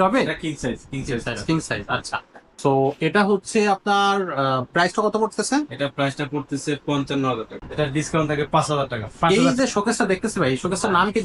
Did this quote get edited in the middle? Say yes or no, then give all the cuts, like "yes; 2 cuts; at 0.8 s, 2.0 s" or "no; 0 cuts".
yes; 2 cuts; at 7.6 s, 9.3 s